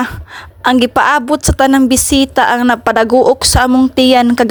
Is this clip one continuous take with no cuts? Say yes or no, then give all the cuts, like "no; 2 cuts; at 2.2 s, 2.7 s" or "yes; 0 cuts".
yes; 0 cuts